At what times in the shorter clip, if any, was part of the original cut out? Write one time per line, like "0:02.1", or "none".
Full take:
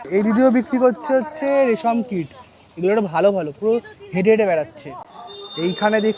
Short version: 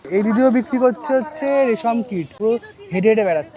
0:02.3